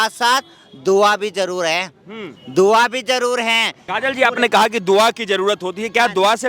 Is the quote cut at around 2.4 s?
no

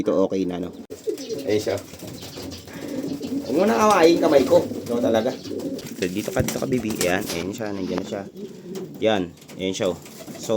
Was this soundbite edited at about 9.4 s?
no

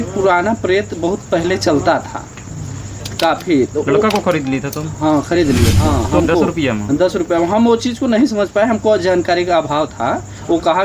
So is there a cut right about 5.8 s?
yes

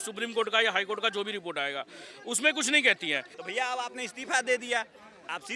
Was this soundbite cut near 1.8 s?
no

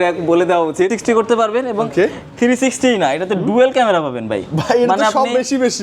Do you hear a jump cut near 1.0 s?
yes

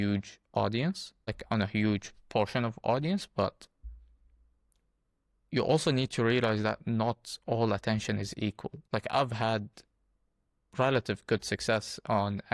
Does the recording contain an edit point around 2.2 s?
no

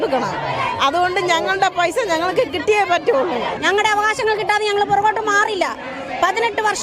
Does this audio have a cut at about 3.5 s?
yes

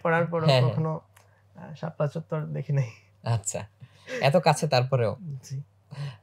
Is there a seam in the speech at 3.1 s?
no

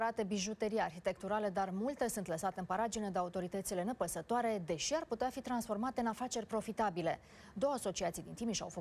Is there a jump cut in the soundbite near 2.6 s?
yes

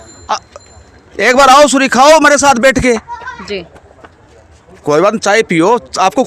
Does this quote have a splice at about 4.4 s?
no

